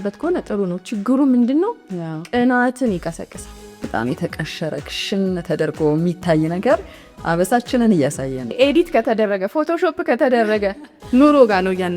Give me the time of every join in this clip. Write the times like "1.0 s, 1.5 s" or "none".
3.9 s, 8.5 s